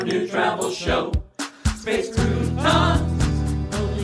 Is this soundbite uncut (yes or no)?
yes